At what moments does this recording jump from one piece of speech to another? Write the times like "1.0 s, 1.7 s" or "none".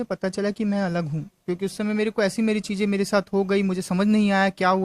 none